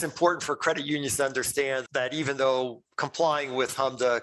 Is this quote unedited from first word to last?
no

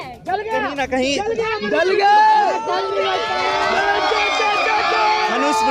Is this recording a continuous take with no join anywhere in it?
yes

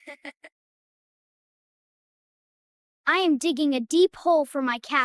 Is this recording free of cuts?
yes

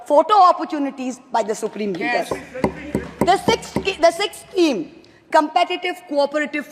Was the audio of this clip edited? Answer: no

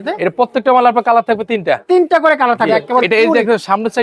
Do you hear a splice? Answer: yes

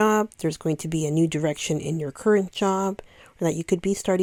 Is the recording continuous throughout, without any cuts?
yes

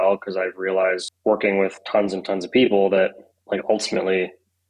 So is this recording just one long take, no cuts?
no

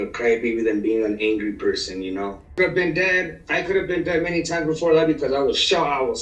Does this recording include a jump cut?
yes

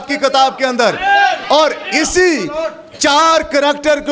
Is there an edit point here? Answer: no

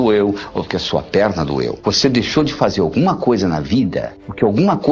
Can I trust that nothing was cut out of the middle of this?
no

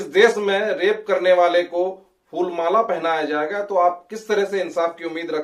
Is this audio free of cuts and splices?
yes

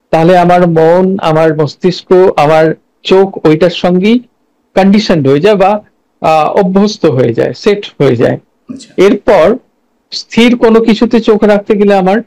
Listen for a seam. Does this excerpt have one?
no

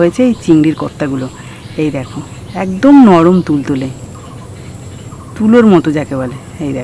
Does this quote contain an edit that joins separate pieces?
no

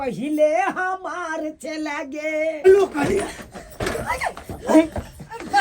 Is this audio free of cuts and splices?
no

